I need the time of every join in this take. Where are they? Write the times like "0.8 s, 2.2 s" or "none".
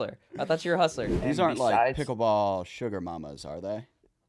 1.1 s